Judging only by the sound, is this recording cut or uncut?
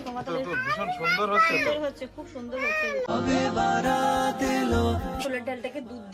cut